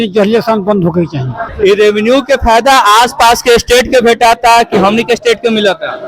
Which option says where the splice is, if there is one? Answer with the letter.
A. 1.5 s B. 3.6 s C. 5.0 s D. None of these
A